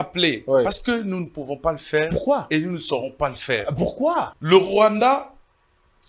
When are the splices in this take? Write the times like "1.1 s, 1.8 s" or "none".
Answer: 4.4 s

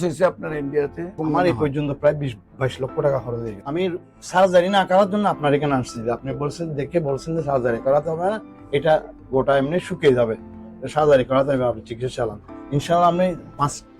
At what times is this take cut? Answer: 1.2 s, 3.5 s

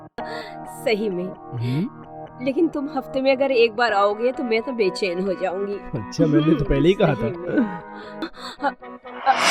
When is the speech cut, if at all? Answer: 8.2 s

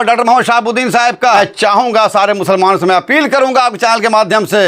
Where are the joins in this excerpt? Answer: 1.4 s

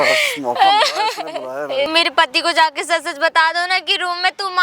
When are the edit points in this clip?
1.9 s

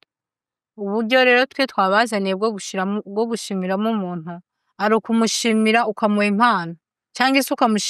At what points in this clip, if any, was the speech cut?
none

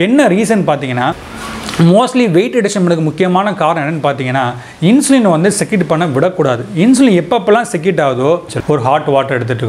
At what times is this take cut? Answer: 8.4 s

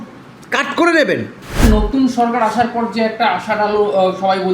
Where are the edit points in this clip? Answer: 1.6 s

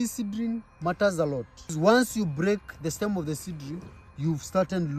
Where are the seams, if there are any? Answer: 1.7 s

